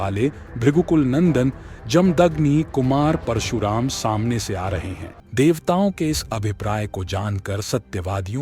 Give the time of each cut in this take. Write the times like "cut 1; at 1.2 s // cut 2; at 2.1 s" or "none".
cut 1; at 5.1 s